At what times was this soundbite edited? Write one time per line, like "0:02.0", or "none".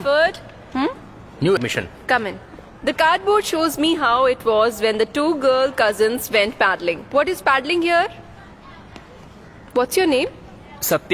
0:01.6